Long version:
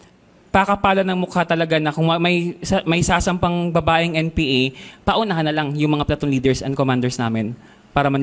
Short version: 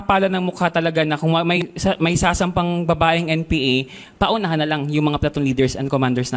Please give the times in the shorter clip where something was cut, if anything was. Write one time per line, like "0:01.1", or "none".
0:01.6